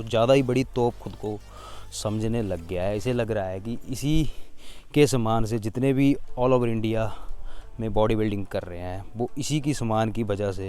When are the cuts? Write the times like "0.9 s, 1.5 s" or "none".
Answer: none